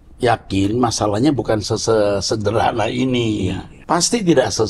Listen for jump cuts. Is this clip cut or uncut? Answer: cut